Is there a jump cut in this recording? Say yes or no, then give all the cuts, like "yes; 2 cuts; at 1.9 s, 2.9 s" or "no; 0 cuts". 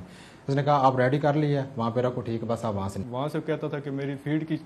yes; 1 cut; at 3.0 s